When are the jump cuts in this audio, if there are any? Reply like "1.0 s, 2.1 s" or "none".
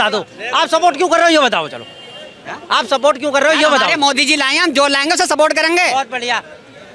none